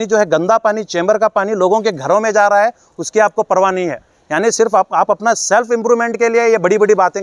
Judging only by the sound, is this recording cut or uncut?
uncut